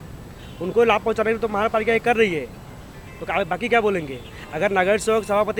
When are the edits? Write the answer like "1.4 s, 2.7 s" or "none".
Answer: none